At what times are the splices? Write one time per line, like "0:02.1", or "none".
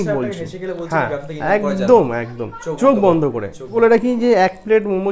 none